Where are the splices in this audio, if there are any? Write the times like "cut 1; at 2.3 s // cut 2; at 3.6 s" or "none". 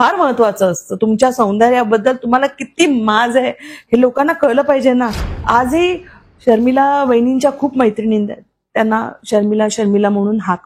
cut 1; at 5.3 s